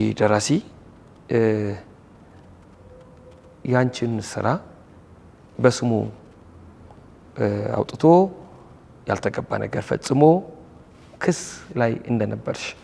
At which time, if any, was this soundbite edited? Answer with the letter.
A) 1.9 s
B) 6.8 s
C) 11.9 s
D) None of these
D